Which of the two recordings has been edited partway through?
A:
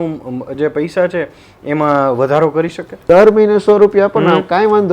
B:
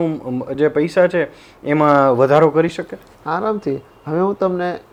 A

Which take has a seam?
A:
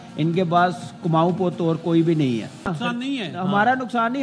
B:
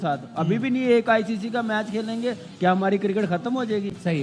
A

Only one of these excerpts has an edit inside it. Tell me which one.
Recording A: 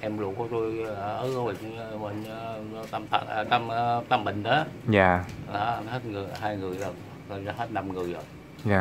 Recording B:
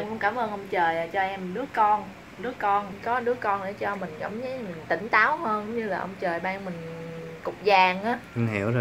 B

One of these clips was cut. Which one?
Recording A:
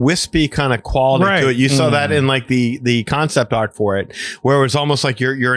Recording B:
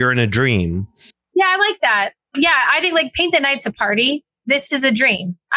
B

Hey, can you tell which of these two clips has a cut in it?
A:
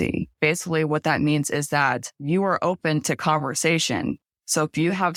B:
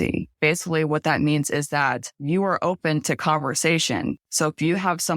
B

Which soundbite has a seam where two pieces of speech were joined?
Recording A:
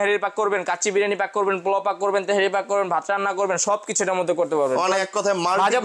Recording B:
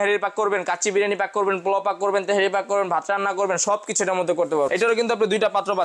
B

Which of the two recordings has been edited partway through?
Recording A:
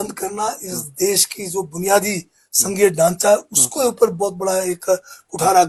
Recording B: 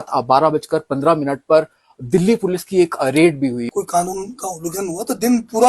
B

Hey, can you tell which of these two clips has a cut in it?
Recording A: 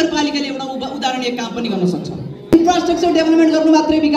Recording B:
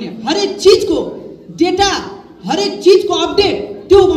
A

